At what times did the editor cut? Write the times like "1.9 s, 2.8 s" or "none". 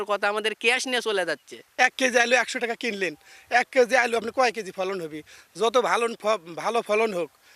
1.6 s